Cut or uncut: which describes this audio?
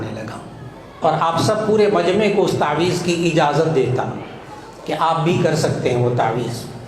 cut